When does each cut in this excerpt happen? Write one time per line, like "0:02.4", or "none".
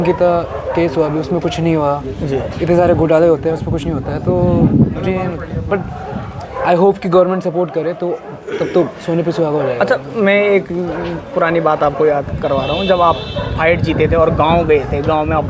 none